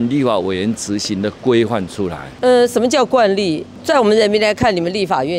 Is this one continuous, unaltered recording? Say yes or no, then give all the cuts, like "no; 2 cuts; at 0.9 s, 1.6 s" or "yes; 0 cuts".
no; 1 cut; at 2.3 s